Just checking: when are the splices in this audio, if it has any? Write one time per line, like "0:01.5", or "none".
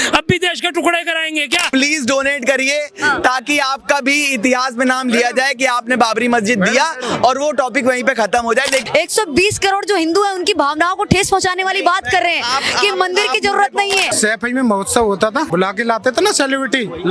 0:01.7
0:08.8
0:14.1
0:15.5